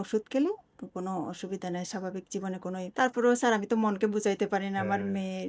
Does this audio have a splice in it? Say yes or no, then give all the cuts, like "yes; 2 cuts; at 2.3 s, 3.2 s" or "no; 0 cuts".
no; 0 cuts